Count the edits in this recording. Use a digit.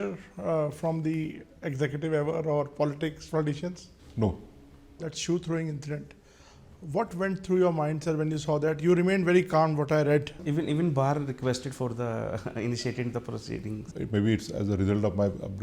3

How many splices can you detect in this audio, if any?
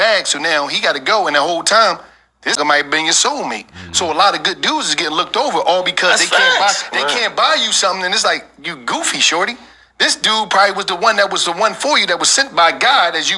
1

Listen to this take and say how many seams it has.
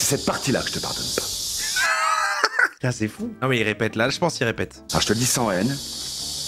1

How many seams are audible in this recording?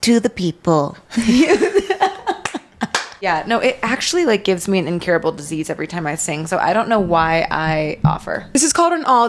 2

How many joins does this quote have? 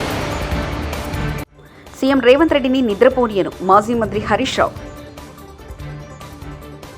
1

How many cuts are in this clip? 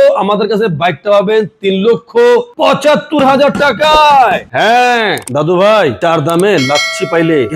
0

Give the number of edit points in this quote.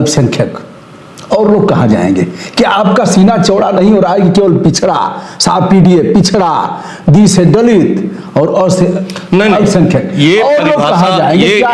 0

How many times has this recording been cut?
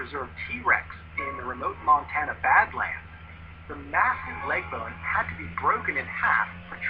1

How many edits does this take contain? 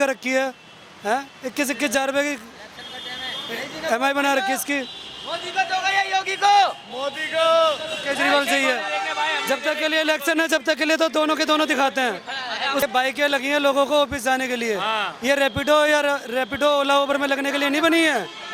1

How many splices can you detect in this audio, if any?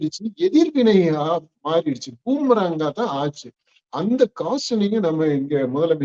0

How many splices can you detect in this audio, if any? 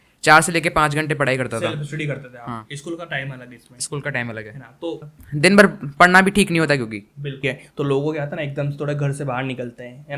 2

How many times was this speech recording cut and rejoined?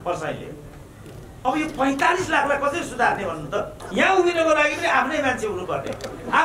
1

